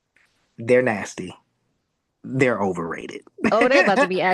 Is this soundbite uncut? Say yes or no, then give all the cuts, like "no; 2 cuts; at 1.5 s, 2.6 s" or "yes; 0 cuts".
yes; 0 cuts